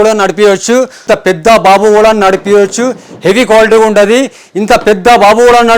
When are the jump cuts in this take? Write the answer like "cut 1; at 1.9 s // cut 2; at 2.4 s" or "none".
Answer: cut 1; at 1.0 s